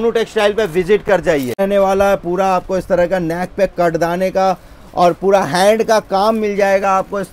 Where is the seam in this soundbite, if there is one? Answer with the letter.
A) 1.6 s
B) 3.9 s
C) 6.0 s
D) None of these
A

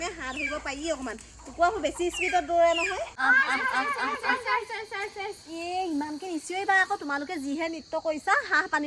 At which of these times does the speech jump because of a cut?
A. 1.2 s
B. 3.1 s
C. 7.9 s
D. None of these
B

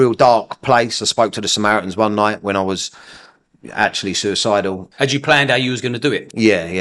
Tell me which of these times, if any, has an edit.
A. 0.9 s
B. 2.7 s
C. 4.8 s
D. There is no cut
C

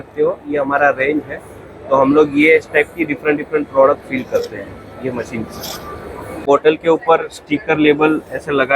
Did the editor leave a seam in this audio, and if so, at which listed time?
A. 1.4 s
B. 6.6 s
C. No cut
B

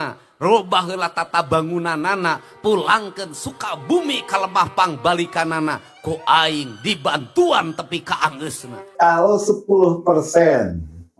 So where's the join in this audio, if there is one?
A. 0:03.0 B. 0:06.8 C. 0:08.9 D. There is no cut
C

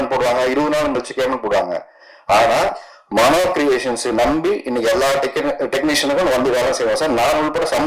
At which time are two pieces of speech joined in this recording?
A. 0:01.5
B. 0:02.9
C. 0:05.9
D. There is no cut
D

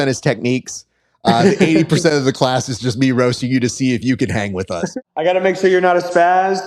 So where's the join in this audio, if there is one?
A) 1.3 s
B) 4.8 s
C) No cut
B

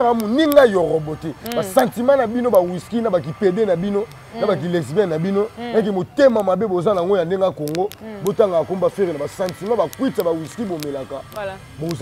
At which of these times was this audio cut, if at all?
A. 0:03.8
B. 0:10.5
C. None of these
C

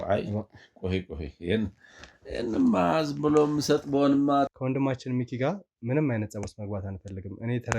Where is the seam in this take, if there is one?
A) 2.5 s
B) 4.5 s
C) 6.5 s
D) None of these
B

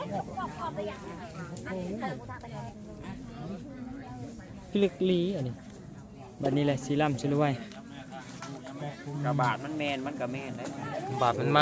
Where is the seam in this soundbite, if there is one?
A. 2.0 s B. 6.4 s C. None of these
C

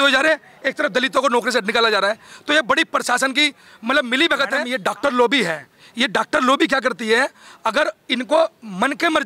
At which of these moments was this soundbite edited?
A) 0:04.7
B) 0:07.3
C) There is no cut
A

